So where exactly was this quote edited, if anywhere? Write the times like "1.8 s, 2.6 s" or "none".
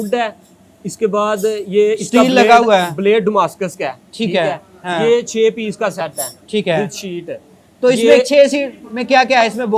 none

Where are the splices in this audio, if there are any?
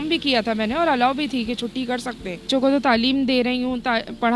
2.5 s

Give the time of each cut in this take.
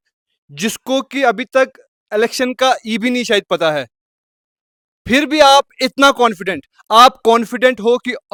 none

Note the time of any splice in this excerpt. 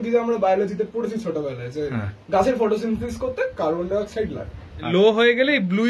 4.8 s

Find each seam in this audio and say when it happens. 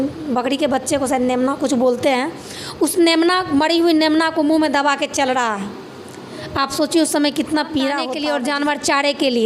8.1 s

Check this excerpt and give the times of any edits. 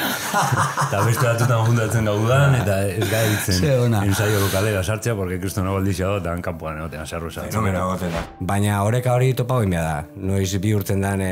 8.3 s

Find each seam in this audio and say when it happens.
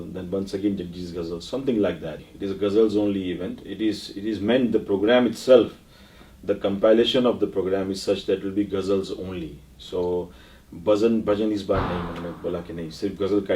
2.2 s

